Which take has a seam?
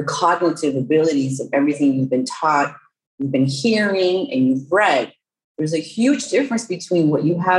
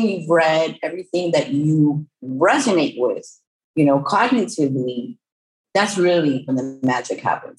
second; 1 cut; at 6.5 s

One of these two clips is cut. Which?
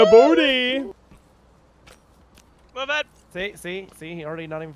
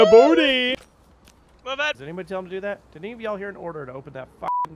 second; 2 cuts; at 0.7 s, 2.0 s

